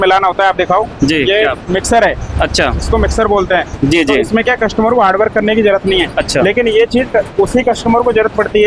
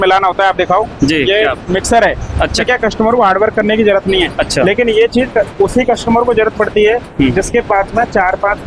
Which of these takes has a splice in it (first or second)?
second